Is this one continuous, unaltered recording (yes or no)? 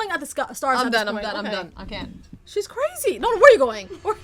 yes